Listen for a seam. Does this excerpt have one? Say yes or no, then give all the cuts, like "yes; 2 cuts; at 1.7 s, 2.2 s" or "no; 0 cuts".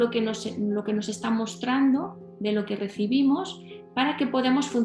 no; 0 cuts